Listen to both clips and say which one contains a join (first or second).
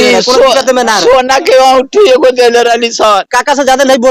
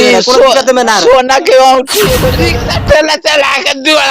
second